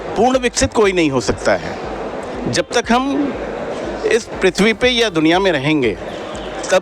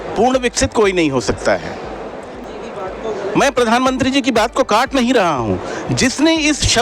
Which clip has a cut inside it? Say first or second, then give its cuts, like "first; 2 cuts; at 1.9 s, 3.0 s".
second; 1 cut; at 2.4 s